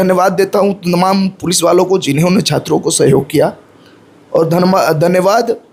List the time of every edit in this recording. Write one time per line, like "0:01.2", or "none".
none